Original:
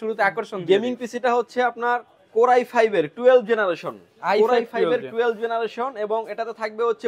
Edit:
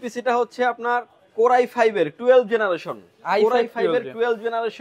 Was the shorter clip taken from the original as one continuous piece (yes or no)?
yes